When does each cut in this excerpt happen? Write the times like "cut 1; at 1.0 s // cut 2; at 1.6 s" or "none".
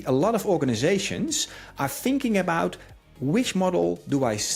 none